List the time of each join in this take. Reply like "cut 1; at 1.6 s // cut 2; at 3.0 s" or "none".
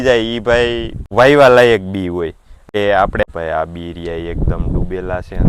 cut 1; at 3.2 s

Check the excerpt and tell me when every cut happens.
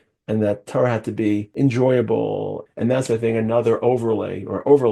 cut 1; at 1.5 s // cut 2; at 2.6 s

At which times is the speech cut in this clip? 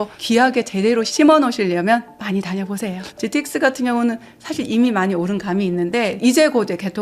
cut 1; at 3.1 s // cut 2; at 6.2 s

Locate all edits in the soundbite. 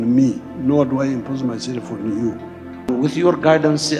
cut 1; at 2.9 s

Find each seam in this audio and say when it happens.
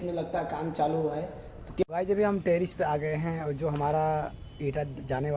cut 1; at 1.8 s

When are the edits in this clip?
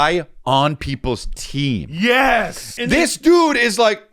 cut 1; at 2.7 s

